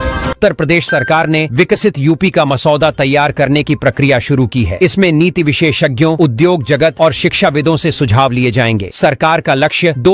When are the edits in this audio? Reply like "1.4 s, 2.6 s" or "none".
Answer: none